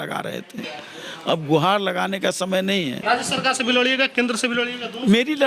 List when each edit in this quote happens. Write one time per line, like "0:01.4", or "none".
0:03.0